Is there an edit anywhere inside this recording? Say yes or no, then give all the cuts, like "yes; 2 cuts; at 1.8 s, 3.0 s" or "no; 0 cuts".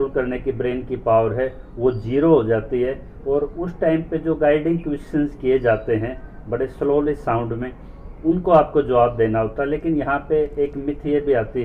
no; 0 cuts